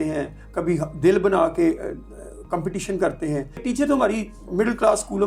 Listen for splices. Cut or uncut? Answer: cut